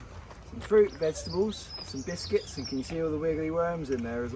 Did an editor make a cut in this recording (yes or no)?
no